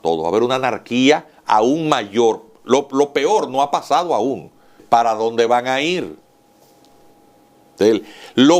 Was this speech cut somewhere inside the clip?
yes; 1 cut; at 4.8 s

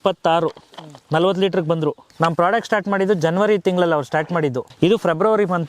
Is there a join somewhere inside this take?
yes; 2 cuts; at 2.1 s, 4.6 s

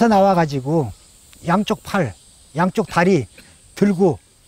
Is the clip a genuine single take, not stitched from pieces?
yes; 0 cuts

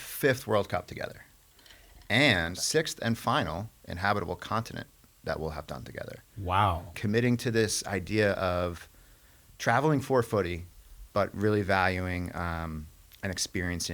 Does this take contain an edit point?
yes; 2 cuts; at 2.6 s, 7.0 s

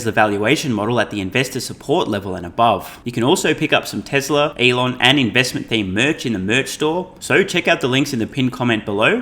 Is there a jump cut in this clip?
yes; 3 cuts; at 3.0 s, 4.5 s, 7.2 s

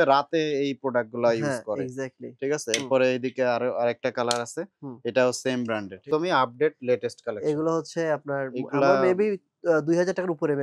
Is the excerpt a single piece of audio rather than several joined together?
no; 1 cut; at 6.0 s

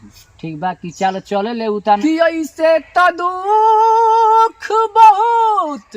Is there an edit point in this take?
yes; 1 cut; at 2.0 s

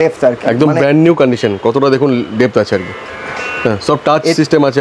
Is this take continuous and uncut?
yes; 0 cuts

